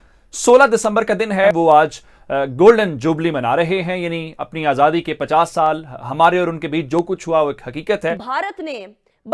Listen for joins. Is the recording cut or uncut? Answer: cut